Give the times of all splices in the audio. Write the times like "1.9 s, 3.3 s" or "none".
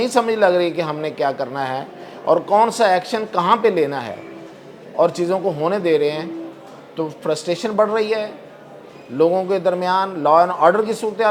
none

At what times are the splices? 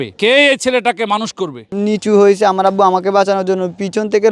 1.6 s

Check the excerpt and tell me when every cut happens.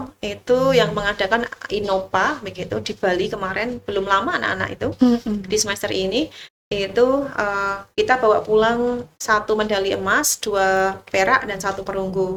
none

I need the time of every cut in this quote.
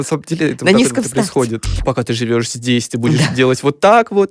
1.7 s

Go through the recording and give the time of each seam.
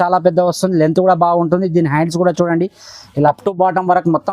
3.4 s

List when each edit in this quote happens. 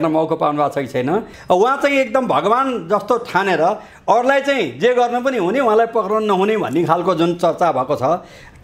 1.3 s

